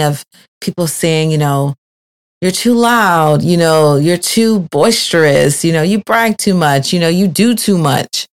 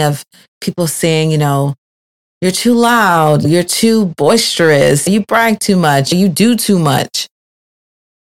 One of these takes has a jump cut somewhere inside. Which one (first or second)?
second